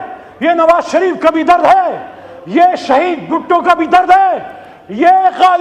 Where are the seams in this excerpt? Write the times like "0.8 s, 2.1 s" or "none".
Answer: none

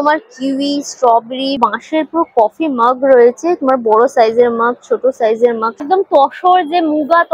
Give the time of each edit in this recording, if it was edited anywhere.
1.6 s, 5.8 s

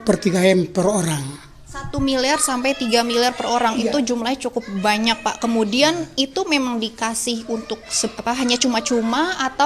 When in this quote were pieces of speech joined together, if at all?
none

